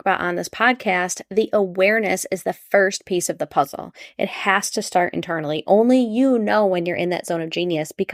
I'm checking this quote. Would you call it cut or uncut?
uncut